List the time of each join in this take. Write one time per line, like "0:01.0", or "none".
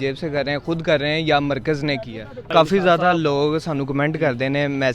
0:02.5